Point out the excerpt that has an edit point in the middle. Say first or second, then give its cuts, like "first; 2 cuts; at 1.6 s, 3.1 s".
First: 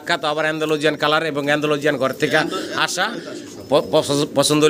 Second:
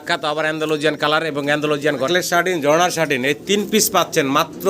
second; 1 cut; at 2.1 s